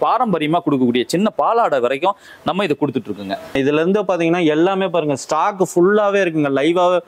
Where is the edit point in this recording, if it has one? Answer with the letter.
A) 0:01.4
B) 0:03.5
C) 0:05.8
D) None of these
B